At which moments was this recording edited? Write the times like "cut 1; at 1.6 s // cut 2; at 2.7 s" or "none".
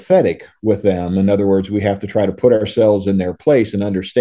none